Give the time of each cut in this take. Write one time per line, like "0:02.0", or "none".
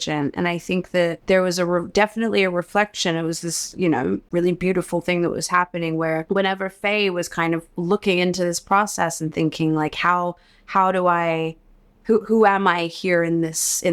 0:01.2
0:04.2
0:06.2

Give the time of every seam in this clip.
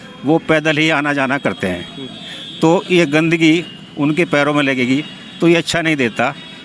none

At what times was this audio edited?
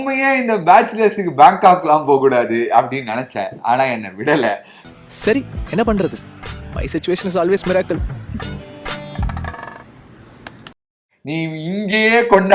none

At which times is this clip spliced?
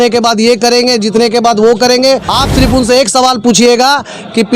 0:02.3

